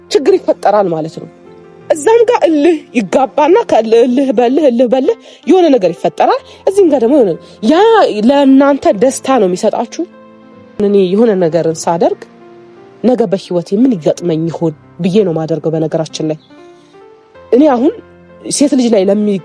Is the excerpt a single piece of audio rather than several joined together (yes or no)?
no